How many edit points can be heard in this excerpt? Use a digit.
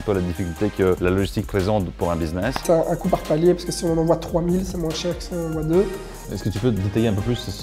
3